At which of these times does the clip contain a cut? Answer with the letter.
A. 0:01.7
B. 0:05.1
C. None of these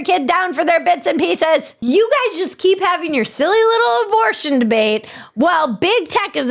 A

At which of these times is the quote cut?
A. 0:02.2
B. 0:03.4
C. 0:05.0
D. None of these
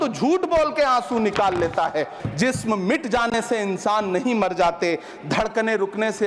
A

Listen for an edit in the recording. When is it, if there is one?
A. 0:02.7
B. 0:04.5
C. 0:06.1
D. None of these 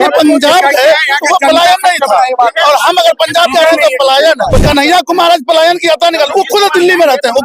B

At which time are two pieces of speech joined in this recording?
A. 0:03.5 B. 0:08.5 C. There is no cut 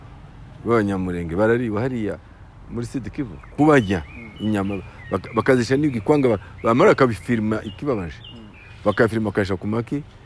A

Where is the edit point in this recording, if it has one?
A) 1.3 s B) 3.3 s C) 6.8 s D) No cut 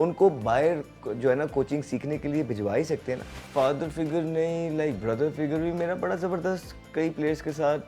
B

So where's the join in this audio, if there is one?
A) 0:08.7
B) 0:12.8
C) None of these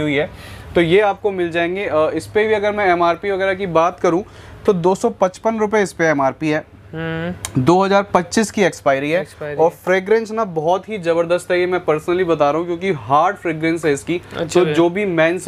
C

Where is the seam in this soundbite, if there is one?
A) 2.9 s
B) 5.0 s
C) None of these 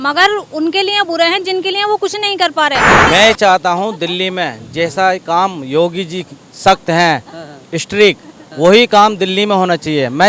A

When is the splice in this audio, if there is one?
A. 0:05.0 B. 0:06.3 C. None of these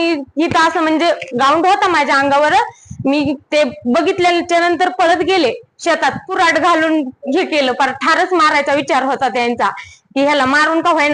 B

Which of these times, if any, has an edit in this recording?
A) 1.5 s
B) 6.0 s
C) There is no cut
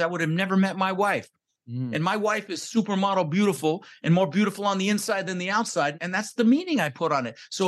B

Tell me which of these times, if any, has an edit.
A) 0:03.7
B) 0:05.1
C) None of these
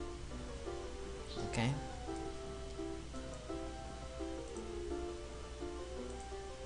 A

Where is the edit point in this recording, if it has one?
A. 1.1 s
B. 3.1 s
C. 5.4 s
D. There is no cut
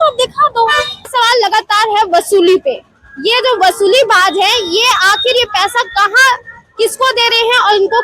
A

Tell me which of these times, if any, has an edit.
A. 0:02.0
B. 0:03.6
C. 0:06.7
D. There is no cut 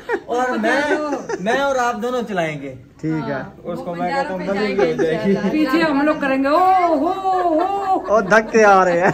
D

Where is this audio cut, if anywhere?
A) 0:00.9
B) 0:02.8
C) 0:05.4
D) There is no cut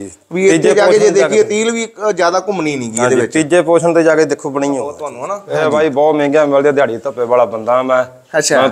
C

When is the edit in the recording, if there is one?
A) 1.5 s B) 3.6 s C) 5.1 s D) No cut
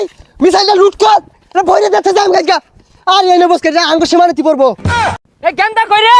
C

